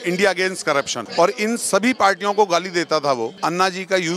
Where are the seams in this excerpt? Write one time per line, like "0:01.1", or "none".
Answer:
0:01.0
0:03.3